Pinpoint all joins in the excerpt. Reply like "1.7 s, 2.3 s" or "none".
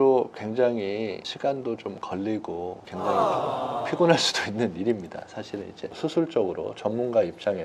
2.8 s, 5.9 s